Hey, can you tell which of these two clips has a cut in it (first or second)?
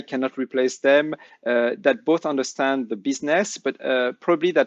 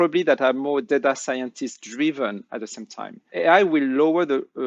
second